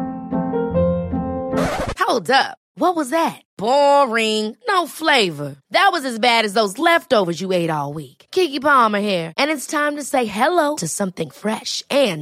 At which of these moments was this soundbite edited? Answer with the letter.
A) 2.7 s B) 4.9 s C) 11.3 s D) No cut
D